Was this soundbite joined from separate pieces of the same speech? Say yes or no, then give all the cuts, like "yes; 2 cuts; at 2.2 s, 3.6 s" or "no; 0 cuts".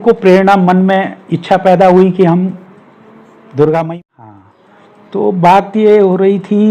yes; 1 cut; at 3.9 s